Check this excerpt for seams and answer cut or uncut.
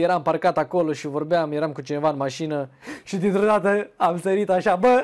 uncut